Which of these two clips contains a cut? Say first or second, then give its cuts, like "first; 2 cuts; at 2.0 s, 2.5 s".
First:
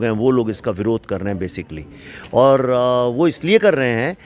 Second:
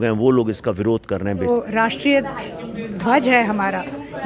second; 1 cut; at 1.5 s